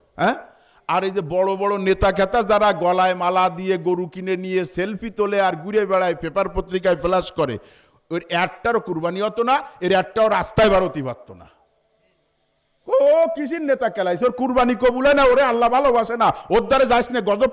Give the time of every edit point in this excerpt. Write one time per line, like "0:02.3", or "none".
none